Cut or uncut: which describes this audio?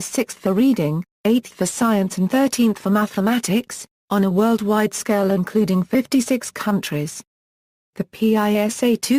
cut